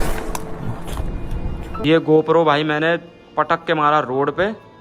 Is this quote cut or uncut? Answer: cut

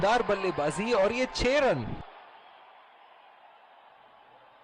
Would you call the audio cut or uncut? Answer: cut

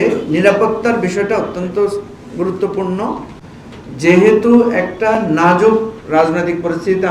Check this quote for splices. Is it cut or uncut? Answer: uncut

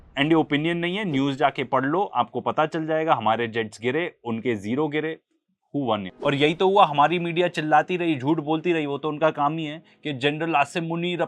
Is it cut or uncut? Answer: cut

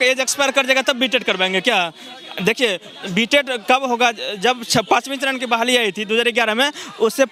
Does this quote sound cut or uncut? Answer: uncut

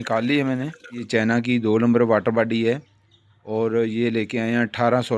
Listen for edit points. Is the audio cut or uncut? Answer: cut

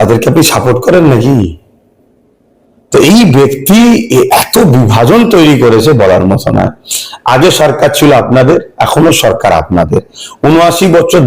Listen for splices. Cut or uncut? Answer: uncut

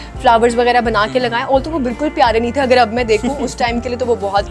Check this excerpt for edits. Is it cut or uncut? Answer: uncut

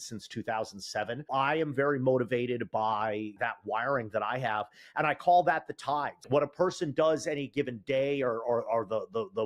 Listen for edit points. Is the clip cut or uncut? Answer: cut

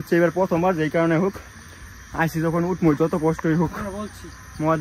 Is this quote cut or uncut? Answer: uncut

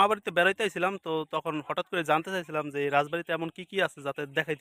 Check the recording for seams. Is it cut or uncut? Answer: uncut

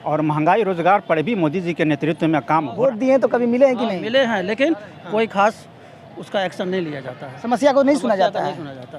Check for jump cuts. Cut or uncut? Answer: cut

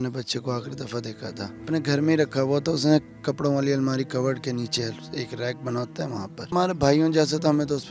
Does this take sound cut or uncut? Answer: cut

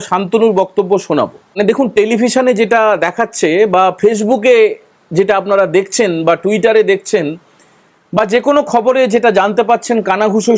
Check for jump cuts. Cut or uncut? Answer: cut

